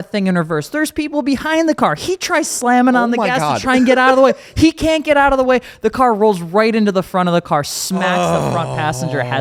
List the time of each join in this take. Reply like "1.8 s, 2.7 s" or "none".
none